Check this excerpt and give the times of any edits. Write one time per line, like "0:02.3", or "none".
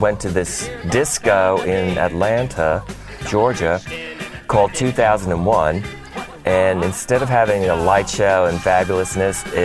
none